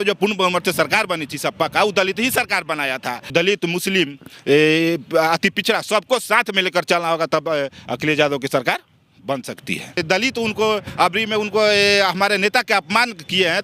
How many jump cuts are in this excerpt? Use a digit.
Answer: 2